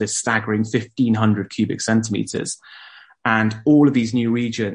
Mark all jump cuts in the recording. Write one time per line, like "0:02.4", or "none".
none